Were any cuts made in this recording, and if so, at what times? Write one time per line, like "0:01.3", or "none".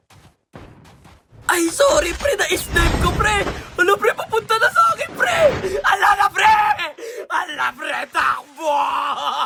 none